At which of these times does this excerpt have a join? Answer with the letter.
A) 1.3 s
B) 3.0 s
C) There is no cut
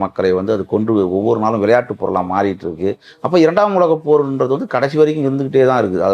C